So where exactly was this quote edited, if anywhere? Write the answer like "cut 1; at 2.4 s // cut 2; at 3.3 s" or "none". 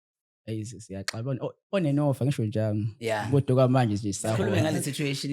cut 1; at 4.4 s